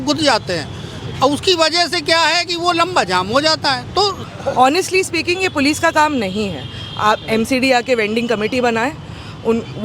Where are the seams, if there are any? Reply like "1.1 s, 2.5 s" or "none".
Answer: 4.2 s